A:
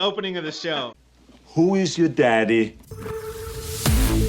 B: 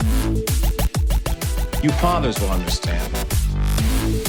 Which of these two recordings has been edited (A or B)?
A